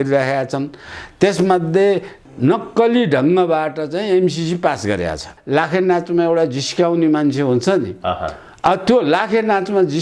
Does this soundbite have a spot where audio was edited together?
yes; 2 cuts; at 2.1 s, 5.4 s

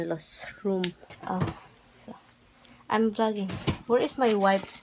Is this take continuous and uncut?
no; 1 cut; at 1.1 s

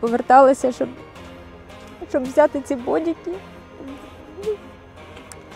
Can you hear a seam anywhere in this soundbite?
no; 0 cuts

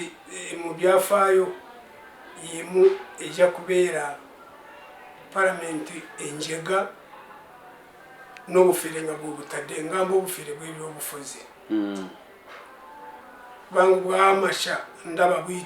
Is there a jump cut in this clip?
no; 0 cuts

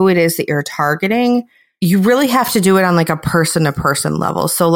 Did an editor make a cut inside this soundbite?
yes; 1 cut; at 1.6 s

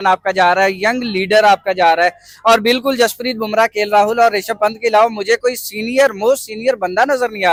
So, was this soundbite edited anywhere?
no; 0 cuts

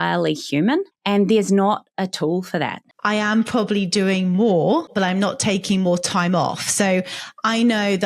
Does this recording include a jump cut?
yes; 3 cuts; at 0.9 s, 2.9 s, 4.9 s

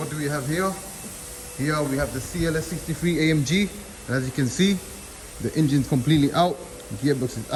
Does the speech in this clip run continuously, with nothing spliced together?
yes; 0 cuts

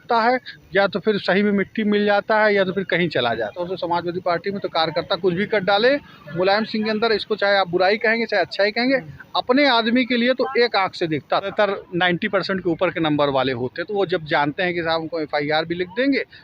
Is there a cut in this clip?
yes; 2 cuts; at 3.6 s, 11.5 s

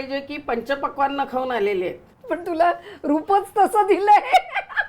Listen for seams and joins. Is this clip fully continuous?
no; 1 cut; at 2.1 s

